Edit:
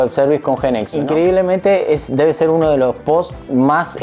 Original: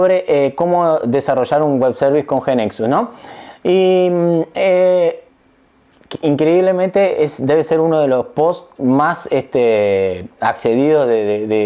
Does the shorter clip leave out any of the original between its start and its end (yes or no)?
yes